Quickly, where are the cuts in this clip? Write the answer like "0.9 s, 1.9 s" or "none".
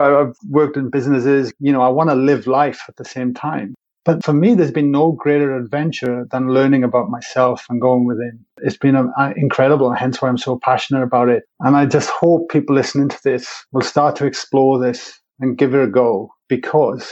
1.5 s